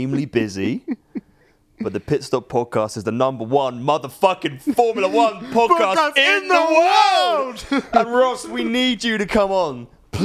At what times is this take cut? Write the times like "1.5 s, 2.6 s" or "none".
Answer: none

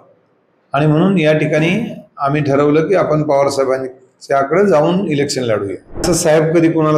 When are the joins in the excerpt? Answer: 6.0 s

